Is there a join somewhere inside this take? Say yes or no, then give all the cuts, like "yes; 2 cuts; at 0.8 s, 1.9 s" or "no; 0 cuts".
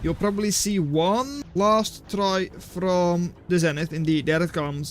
yes; 2 cuts; at 1.4 s, 3.4 s